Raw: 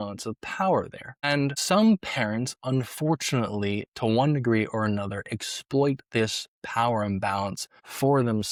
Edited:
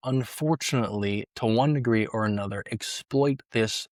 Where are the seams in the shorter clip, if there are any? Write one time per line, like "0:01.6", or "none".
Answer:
none